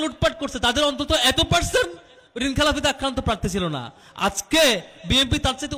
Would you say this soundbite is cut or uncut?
uncut